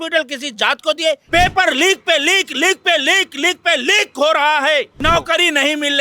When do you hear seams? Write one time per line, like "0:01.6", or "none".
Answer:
0:01.2
0:04.9